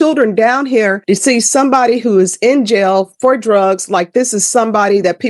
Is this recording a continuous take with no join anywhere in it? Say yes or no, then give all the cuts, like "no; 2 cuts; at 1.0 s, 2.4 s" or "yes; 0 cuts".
no; 1 cut; at 1.0 s